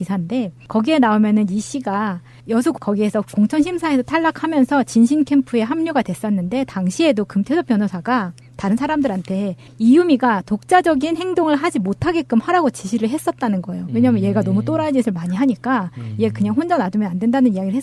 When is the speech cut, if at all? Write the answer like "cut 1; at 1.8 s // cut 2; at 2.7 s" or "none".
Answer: cut 1; at 5.0 s